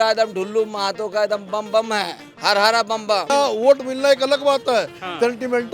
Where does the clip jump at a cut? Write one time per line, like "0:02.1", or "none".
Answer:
0:02.2
0:03.3